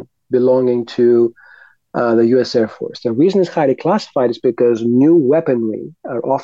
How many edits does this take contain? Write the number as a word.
zero